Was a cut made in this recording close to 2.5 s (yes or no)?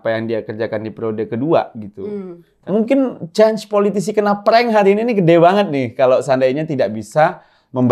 yes